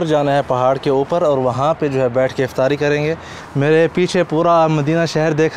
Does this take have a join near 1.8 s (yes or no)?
no